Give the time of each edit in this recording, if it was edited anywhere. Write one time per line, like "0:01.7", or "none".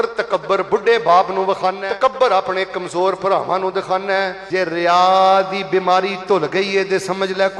0:01.9
0:04.4